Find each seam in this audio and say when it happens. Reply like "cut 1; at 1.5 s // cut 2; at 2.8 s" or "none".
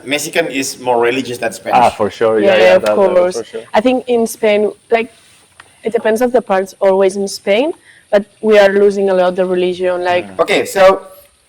cut 1; at 10.3 s